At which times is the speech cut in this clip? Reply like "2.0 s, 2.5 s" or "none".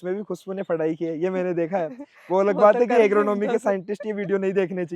none